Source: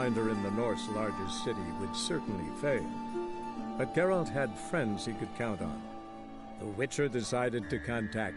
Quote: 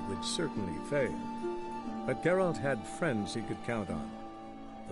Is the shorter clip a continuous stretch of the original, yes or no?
yes